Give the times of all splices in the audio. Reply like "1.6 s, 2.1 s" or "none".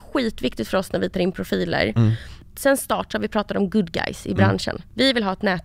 2.3 s